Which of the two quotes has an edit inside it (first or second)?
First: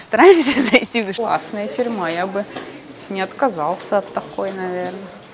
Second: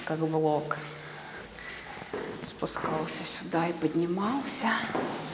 first